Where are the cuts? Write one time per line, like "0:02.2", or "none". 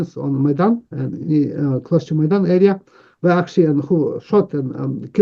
none